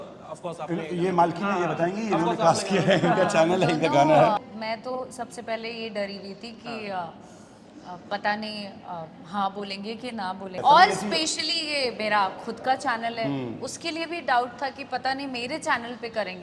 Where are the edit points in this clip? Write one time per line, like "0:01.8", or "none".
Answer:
0:04.4
0:10.6